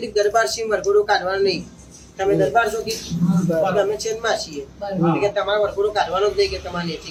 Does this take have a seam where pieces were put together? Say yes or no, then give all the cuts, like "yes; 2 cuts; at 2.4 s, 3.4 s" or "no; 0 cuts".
no; 0 cuts